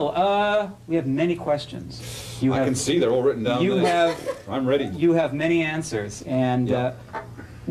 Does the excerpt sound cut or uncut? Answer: uncut